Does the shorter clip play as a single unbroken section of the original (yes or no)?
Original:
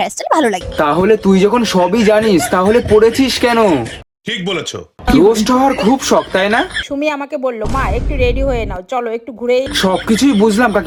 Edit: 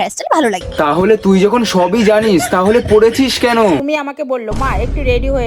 no